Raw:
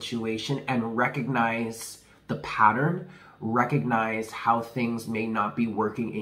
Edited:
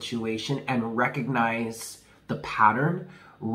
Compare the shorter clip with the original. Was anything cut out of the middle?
no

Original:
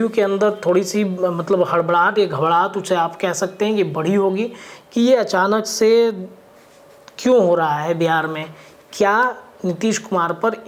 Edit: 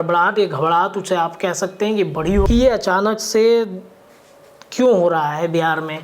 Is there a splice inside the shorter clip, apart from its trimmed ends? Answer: yes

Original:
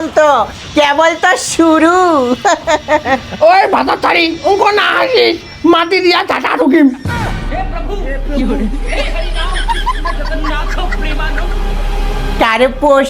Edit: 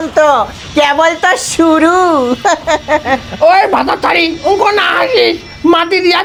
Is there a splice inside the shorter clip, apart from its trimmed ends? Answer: no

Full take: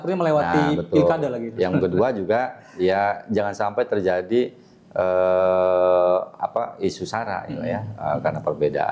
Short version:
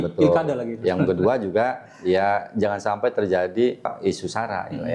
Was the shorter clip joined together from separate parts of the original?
yes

